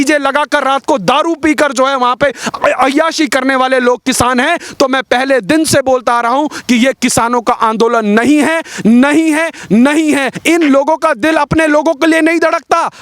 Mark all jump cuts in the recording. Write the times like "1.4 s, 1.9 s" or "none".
10.3 s